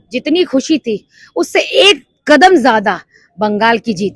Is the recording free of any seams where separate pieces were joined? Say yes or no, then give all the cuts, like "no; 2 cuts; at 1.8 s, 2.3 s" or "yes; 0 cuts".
yes; 0 cuts